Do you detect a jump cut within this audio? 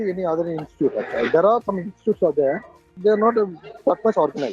yes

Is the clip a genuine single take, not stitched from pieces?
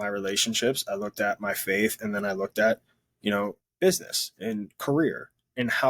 no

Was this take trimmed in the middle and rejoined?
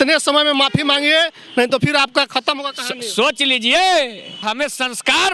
yes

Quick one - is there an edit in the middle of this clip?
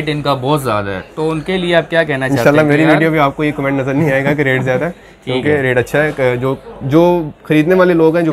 no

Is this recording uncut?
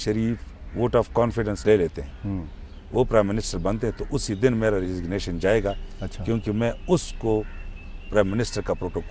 yes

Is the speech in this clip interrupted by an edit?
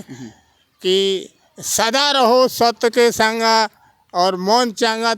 no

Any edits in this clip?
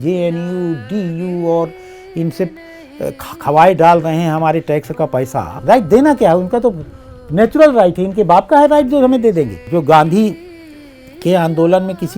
yes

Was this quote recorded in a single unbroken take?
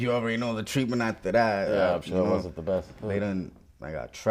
yes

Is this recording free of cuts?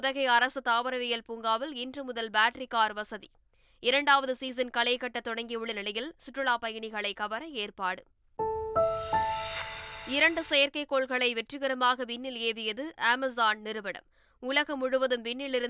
yes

